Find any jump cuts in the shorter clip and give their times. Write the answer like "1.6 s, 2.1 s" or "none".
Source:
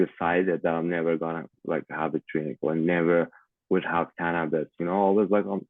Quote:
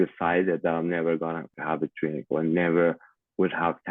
1.6 s